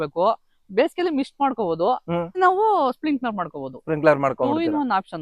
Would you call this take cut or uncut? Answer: cut